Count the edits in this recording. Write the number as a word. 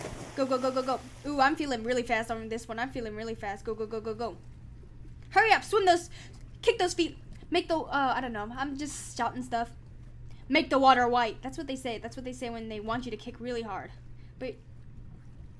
one